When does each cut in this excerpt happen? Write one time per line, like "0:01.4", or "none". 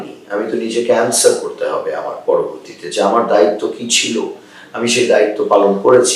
none